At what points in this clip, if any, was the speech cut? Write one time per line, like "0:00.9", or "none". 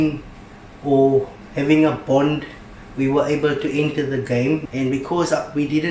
0:04.7